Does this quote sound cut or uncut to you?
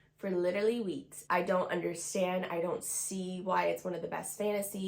cut